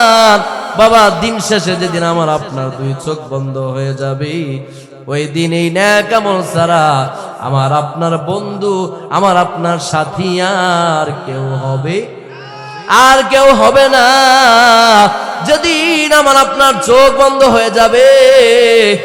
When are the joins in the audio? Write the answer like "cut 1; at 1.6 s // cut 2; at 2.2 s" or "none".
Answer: cut 1; at 15.3 s